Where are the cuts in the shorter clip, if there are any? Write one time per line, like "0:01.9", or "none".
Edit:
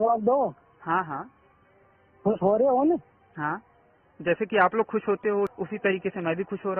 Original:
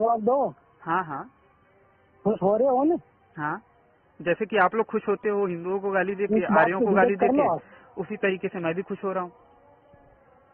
0:05.6